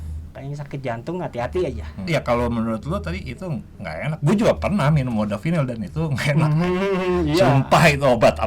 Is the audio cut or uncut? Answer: cut